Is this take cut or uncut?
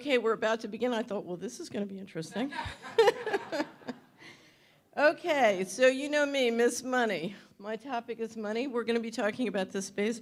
uncut